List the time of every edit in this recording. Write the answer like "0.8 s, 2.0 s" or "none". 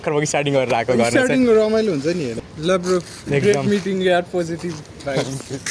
2.4 s